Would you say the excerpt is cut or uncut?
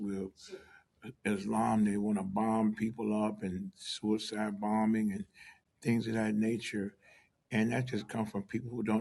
uncut